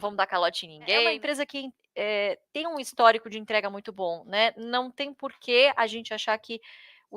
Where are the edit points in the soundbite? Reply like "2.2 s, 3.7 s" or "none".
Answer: 1.1 s